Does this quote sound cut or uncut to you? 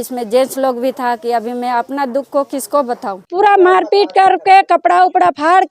cut